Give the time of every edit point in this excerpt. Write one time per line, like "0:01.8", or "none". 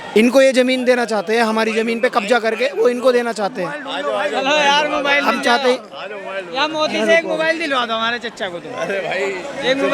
none

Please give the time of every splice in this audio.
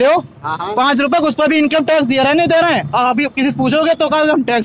none

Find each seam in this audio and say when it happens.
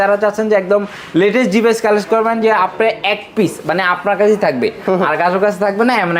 none

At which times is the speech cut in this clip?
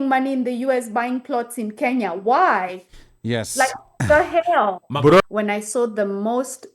0:05.2

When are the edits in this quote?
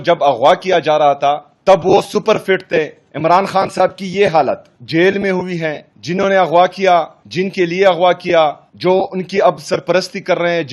0:01.5
0:03.0
0:04.7
0:05.9
0:07.2
0:08.7

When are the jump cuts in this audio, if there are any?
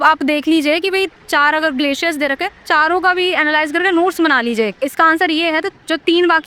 0:04.7

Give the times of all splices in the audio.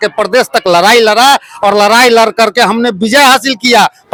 none

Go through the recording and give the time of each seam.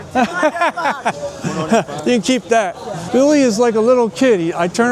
0:02.9

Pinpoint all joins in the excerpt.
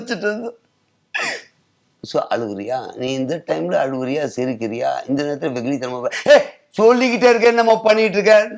none

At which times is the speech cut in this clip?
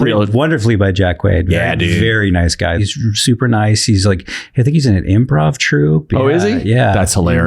0:02.8

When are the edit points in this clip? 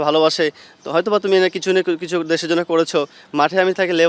0:03.2

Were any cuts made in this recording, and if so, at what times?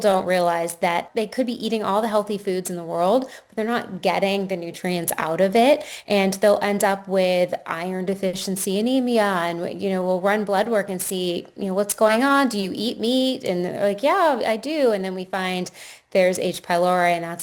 0:01.1

